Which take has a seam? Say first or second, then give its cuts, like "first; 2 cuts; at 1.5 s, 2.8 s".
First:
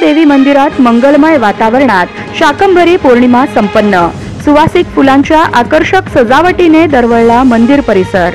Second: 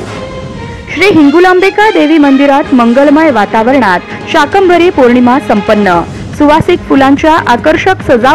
second; 1 cut; at 0.9 s